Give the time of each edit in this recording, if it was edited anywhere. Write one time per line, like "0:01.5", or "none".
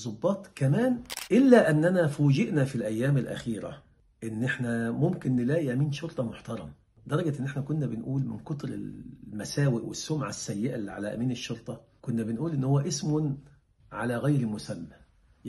0:01.1